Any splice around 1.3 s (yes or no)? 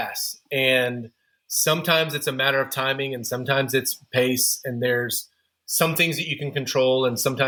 no